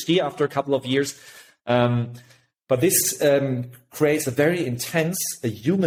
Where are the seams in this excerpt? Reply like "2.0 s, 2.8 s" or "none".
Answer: none